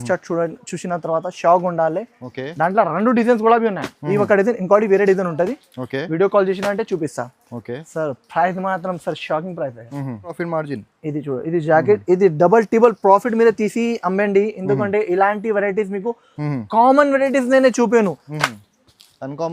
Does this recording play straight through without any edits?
no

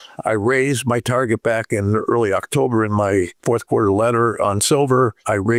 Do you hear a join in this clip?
no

